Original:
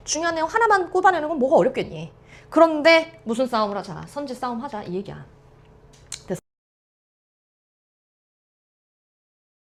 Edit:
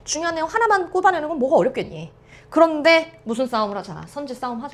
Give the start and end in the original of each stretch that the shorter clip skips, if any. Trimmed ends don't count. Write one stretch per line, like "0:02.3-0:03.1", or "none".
none